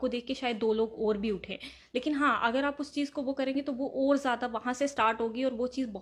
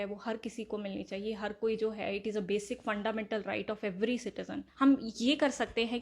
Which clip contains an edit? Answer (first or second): second